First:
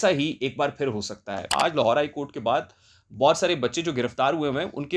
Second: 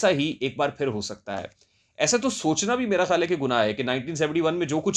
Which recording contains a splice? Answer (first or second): first